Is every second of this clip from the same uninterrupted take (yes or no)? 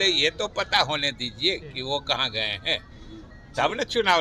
yes